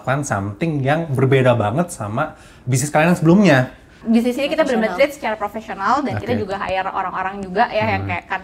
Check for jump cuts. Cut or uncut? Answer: cut